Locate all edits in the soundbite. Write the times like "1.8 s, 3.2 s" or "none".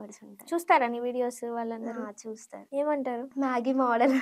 2.5 s, 3.3 s